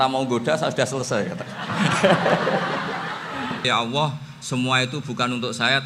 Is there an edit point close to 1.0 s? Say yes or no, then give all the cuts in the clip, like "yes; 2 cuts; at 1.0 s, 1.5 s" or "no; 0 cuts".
no; 1 cut; at 3.7 s